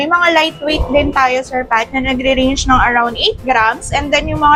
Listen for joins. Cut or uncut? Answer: uncut